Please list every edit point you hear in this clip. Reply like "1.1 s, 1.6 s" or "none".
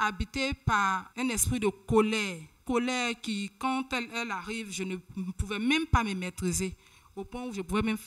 1.1 s, 2.6 s